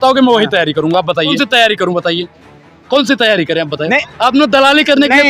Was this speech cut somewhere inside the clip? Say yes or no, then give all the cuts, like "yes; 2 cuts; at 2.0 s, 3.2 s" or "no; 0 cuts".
yes; 1 cut; at 1.4 s